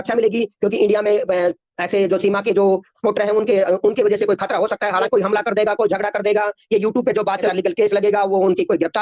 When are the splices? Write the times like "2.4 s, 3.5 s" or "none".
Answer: 5.0 s, 7.5 s